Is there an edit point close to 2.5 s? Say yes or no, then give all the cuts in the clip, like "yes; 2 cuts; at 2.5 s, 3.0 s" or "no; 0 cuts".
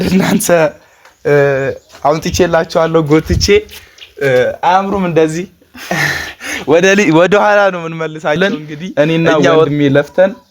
no; 1 cut; at 8.4 s